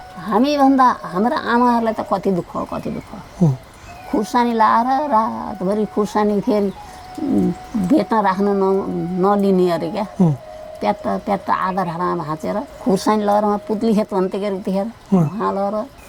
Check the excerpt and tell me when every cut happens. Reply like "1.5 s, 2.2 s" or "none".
none

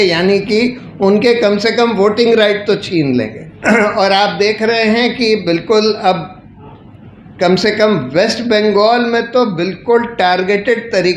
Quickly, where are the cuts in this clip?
3.4 s

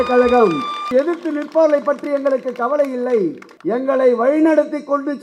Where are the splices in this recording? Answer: 0.8 s, 3.5 s

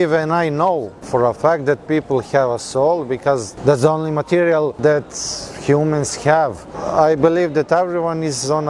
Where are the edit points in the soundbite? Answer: 1.0 s, 3.5 s, 4.8 s, 6.8 s

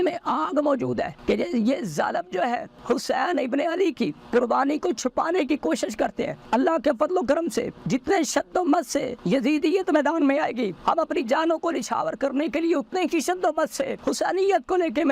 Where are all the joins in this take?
1.2 s, 2.7 s, 4.2 s, 6.4 s, 7.8 s, 9.1 s, 10.8 s, 14.0 s

